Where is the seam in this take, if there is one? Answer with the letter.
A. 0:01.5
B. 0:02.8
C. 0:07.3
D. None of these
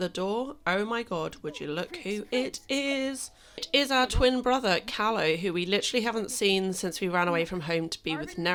D